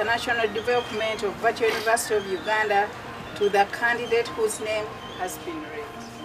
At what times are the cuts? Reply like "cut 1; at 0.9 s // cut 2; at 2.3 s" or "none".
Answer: none